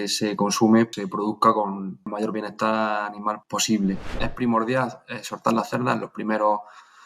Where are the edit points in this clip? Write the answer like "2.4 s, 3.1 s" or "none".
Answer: 0.9 s, 2.1 s, 3.4 s, 4.2 s